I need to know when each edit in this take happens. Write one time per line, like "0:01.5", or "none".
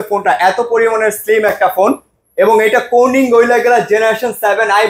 none